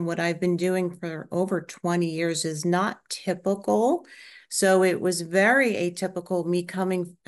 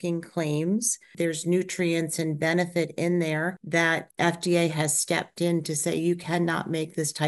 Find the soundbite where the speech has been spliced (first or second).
second